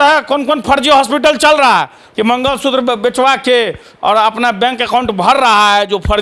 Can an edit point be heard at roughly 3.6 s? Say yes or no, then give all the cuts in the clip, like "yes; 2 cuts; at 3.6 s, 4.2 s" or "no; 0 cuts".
no; 1 cut; at 2.0 s